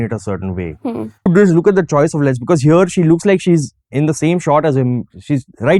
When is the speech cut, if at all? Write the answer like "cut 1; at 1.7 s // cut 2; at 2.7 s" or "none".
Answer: cut 1; at 1.3 s